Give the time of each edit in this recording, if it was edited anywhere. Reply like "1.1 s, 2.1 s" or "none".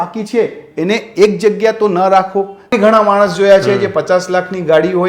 2.7 s